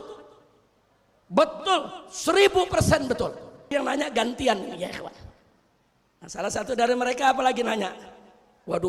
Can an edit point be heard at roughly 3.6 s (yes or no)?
yes